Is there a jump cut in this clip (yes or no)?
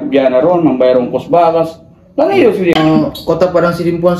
yes